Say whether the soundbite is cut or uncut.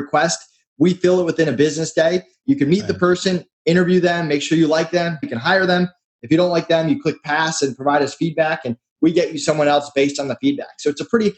cut